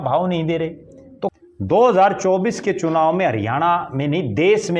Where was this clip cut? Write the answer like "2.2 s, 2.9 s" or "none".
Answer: 1.4 s